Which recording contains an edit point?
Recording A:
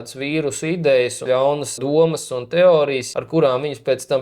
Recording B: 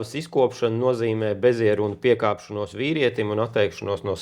A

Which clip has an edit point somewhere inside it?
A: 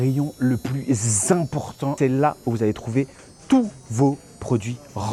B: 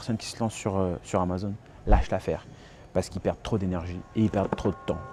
A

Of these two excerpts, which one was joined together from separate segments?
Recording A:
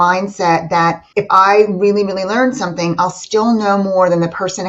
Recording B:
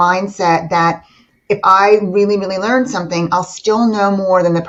A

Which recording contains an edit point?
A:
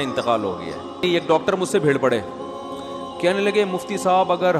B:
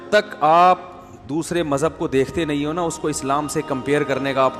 A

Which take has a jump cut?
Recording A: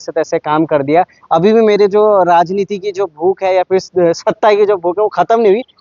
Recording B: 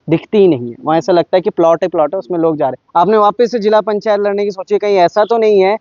B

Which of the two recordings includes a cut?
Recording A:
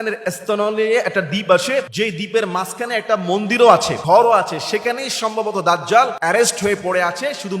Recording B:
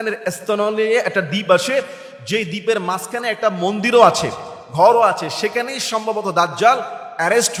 A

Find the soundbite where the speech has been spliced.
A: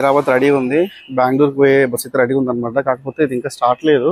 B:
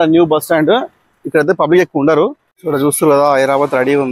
B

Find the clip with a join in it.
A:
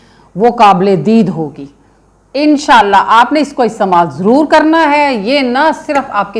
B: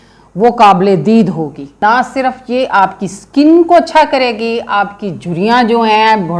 B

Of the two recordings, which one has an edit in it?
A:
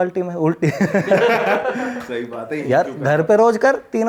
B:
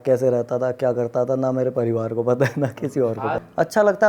B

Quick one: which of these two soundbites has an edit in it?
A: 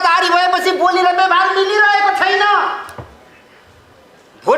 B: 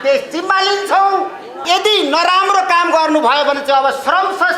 B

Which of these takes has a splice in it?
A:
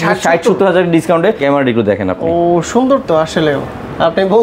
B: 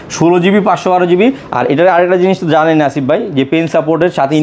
A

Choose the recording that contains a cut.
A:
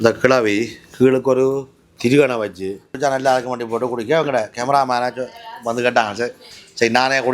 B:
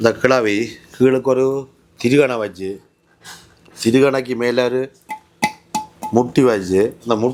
A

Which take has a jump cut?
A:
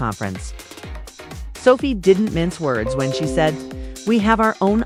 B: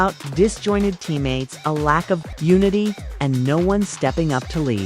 B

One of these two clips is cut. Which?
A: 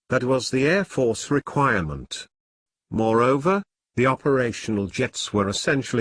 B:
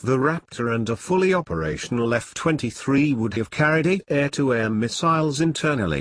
A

